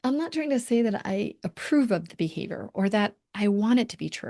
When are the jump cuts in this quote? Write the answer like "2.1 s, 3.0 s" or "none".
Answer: none

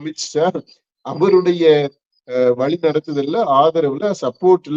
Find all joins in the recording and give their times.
none

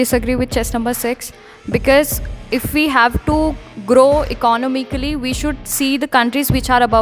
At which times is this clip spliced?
none

